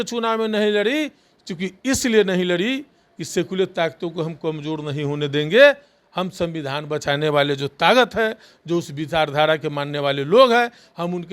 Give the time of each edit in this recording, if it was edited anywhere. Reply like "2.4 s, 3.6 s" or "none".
none